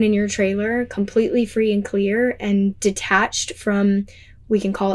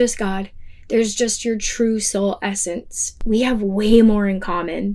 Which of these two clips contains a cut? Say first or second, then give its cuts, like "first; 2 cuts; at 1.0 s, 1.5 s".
second; 1 cut; at 3.1 s